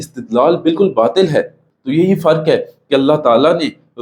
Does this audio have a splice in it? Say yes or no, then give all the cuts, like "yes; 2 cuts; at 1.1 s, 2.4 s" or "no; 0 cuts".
yes; 1 cut; at 1.6 s